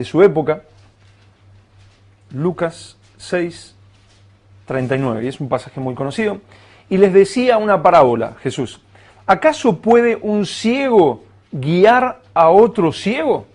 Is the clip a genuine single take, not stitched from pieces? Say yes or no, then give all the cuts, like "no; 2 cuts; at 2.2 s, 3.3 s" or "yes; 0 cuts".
no; 1 cut; at 8.5 s